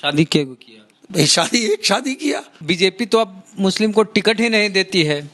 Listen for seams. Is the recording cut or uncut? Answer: cut